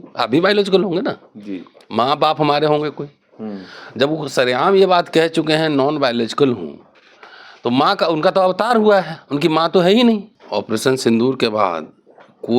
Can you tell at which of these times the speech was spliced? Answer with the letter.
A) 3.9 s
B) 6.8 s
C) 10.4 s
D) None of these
C